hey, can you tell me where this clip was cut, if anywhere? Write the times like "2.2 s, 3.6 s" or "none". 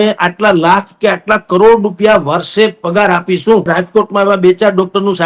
3.7 s